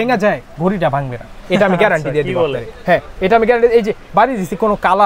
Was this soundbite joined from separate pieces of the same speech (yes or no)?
no